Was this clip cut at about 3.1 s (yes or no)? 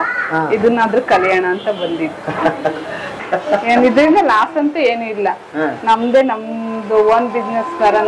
yes